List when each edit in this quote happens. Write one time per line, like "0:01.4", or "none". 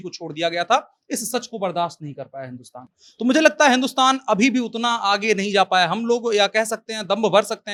none